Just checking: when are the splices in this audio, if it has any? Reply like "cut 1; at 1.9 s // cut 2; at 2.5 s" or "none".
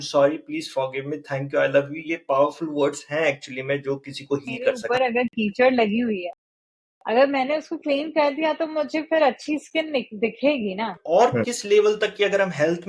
cut 1; at 4.8 s // cut 2; at 11.0 s